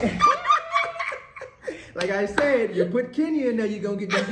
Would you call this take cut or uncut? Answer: uncut